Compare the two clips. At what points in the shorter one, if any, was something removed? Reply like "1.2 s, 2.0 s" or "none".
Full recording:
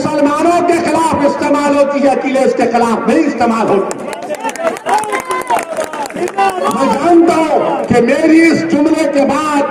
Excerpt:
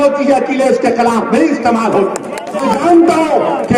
2.6 s